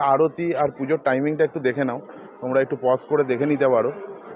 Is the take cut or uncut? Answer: uncut